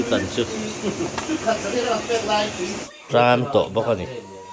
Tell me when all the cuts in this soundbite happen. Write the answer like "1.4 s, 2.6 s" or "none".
2.8 s